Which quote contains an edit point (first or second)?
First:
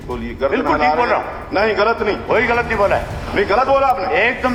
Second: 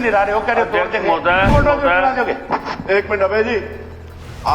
second